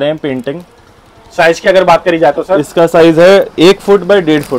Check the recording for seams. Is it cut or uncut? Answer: uncut